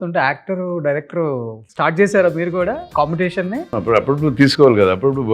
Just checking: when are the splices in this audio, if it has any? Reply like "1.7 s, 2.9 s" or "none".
1.6 s, 2.8 s, 3.7 s